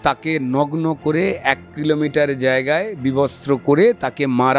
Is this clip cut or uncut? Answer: uncut